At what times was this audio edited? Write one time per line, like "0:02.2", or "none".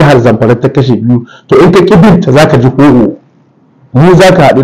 none